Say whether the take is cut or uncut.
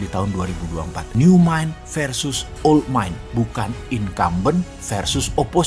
uncut